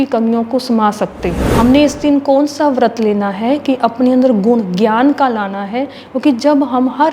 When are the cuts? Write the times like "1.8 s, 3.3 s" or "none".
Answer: 1.4 s

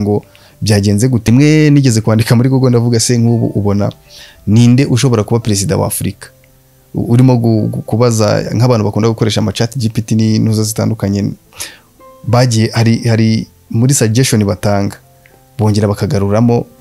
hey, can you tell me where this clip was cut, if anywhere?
1.2 s

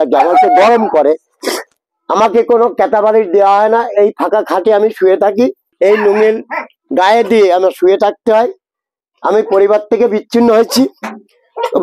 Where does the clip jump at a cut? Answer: 5.6 s

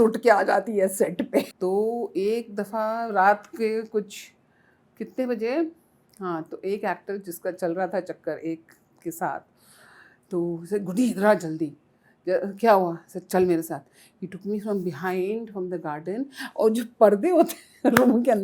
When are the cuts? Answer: 1.5 s

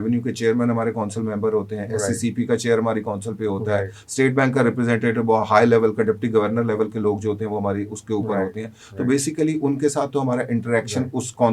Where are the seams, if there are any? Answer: none

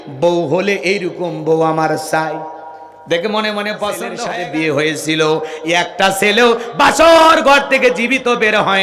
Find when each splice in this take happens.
4.1 s

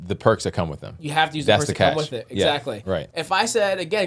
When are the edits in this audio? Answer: 3.1 s

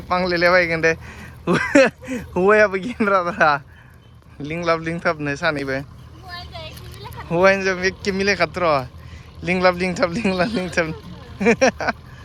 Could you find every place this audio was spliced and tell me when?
none

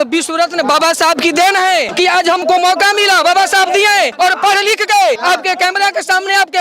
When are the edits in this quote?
2.3 s, 4.1 s, 5.2 s

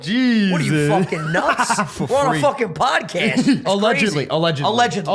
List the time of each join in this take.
3.6 s

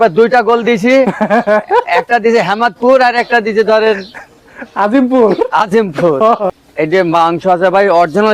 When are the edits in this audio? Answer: 6.4 s

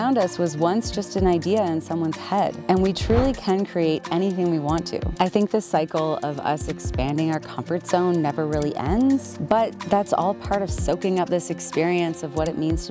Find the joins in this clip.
2.6 s, 5.0 s, 9.3 s

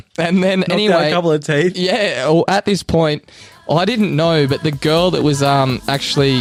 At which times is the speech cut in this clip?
none

